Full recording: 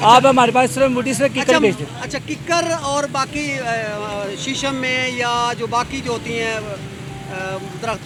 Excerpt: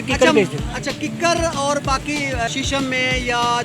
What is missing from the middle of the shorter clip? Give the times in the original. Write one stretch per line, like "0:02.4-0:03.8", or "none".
0:03.8-0:04.4